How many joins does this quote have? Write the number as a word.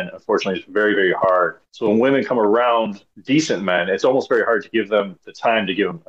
two